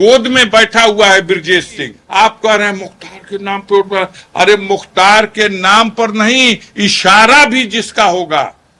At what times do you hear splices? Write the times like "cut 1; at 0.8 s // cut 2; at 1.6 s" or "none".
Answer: cut 1; at 2.0 s